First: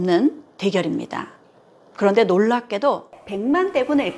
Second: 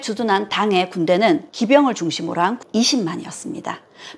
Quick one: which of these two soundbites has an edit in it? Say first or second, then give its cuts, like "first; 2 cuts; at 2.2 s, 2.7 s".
first; 1 cut; at 3.2 s